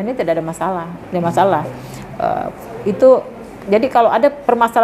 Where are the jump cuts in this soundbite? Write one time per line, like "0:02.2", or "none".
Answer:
none